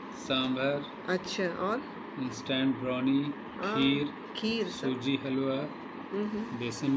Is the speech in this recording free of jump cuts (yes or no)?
yes